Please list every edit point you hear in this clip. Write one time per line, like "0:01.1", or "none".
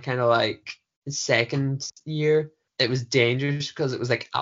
0:02.6